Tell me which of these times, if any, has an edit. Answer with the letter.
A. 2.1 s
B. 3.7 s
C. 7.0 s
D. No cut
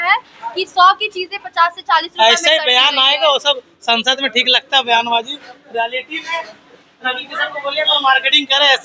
D